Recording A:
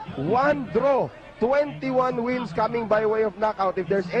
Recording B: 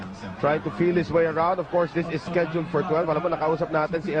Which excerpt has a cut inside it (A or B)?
A